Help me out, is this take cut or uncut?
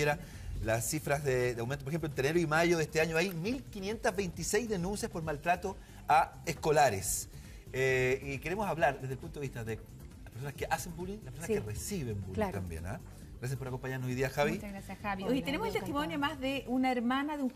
uncut